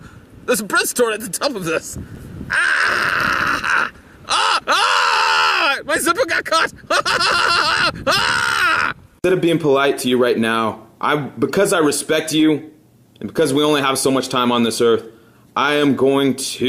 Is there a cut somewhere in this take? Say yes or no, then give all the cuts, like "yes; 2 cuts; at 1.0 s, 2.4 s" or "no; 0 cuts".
yes; 1 cut; at 4.0 s